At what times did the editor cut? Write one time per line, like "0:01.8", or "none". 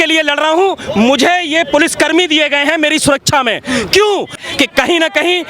0:04.4